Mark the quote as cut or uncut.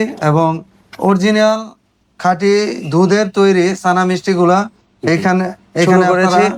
uncut